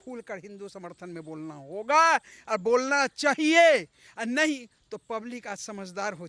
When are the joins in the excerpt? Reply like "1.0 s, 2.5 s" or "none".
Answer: none